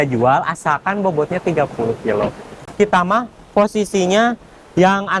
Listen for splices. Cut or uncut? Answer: cut